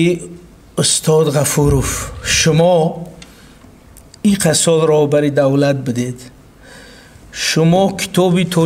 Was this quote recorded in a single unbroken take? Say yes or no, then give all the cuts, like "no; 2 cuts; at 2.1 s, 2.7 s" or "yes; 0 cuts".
yes; 0 cuts